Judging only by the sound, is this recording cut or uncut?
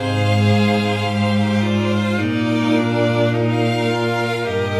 uncut